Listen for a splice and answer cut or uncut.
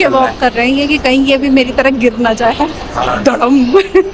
cut